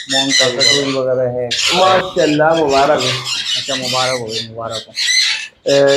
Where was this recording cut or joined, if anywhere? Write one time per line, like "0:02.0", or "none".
0:01.6